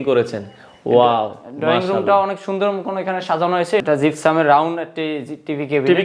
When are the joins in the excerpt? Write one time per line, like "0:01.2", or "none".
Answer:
0:03.8

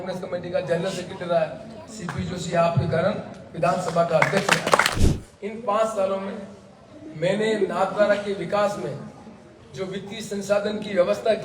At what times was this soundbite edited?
0:04.9

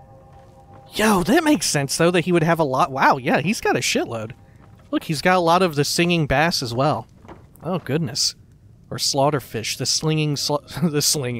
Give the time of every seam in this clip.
none

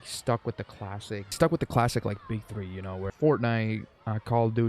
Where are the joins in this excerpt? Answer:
0:01.3
0:03.1

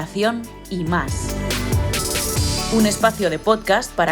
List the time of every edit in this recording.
0:01.1
0:02.7

